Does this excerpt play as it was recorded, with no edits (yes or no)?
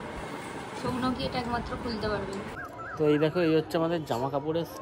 no